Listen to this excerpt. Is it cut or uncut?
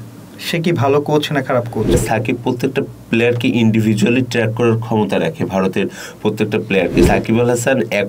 cut